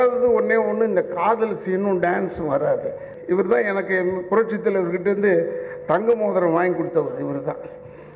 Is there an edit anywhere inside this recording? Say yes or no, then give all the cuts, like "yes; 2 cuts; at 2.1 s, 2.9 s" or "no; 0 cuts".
yes; 1 cut; at 3.1 s